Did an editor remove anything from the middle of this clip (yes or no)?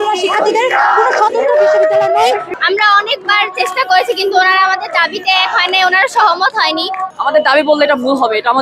yes